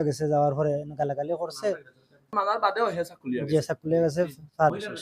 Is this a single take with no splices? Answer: no; 1 cut; at 2.3 s

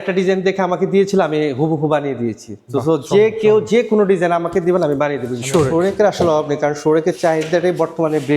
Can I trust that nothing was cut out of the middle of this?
no; 1 cut; at 5.3 s

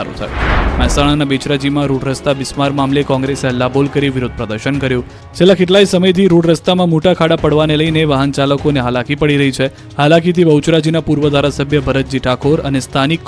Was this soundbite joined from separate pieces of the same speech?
yes; 1 cut; at 4.6 s

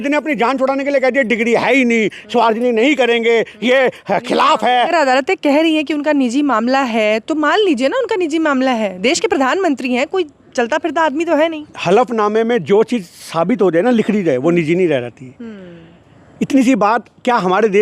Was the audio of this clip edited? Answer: yes; 1 cut; at 4.9 s

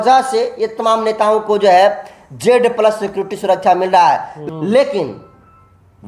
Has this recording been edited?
yes; 1 cut; at 4.4 s

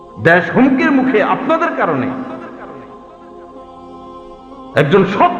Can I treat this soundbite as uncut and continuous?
no; 2 cuts; at 2.8 s, 4.2 s

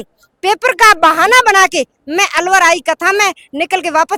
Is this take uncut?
yes; 0 cuts

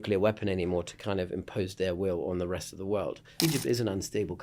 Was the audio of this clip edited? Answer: yes; 1 cut; at 3.2 s

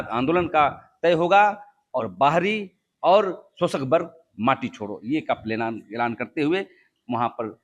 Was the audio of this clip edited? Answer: no; 0 cuts

